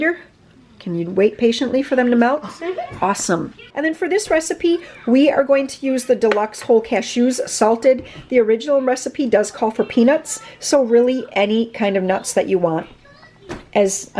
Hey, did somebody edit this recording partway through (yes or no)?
no